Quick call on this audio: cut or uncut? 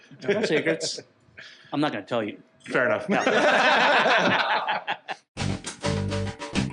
cut